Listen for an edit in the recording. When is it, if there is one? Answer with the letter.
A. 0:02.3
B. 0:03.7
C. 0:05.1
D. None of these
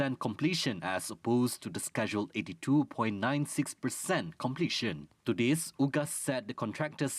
C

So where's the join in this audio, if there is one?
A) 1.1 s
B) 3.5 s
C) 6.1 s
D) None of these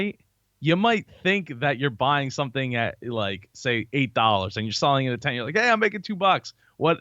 D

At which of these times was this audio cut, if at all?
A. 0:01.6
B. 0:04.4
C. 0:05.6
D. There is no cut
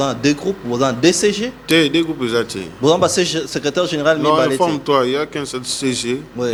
D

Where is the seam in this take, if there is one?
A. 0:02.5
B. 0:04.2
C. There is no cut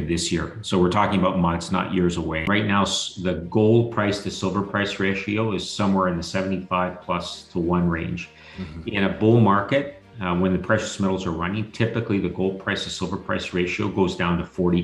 A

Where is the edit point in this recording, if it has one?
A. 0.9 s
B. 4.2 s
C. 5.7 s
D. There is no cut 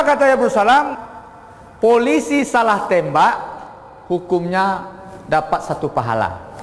A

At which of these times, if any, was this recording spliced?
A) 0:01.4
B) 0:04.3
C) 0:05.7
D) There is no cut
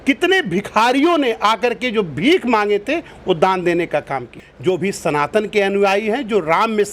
B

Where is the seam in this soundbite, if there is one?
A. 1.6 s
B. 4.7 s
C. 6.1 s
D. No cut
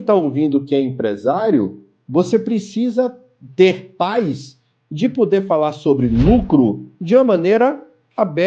D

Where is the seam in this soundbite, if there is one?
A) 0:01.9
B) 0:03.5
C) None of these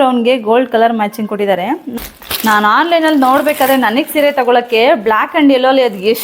A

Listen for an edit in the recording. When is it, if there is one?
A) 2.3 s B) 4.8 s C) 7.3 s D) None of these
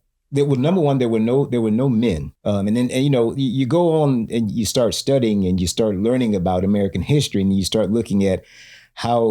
A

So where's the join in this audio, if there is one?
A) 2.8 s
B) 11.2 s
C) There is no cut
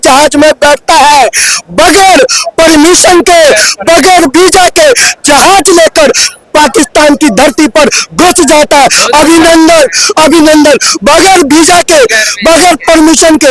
C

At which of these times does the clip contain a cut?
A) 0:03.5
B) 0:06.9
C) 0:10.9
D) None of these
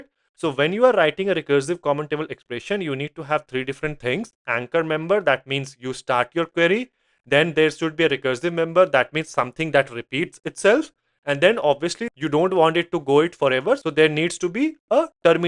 D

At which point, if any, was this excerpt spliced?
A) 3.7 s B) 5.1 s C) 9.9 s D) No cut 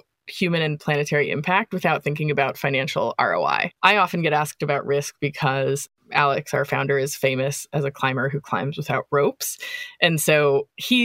A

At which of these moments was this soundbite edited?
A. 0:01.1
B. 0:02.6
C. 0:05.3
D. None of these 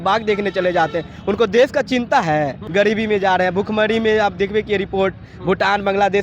B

